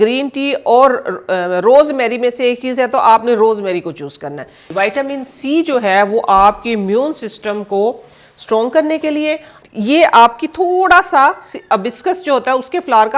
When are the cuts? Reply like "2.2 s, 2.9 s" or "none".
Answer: 4.6 s, 9.5 s